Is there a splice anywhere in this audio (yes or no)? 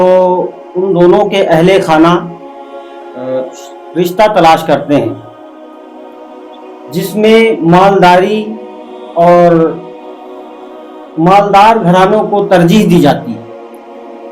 yes